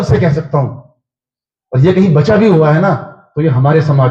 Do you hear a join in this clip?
no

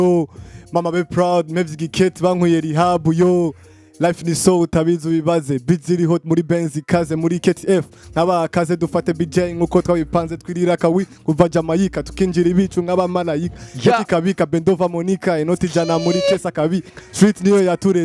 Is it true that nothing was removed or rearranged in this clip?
yes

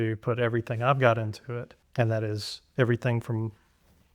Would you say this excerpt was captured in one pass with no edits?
no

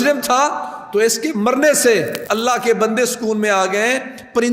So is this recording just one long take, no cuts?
no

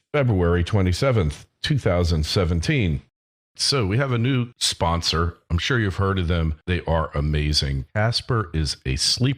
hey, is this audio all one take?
yes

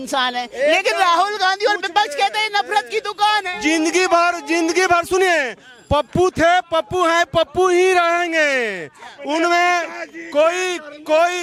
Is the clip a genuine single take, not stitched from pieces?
yes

